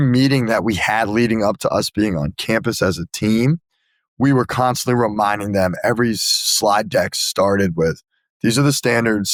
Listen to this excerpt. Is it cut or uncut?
uncut